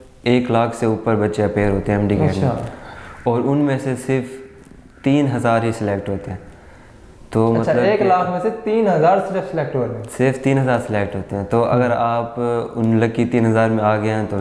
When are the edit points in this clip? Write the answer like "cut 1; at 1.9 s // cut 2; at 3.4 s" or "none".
none